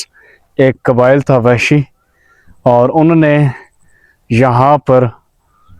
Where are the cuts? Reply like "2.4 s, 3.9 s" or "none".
none